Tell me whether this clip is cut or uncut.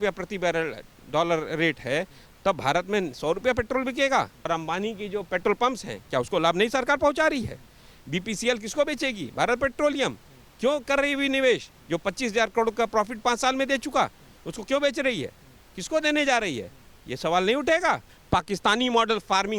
cut